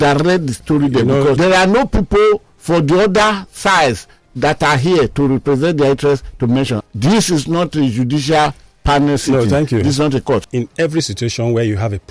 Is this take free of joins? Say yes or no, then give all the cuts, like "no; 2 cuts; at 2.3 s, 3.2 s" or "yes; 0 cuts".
no; 3 cuts; at 1.4 s, 6.8 s, 10.4 s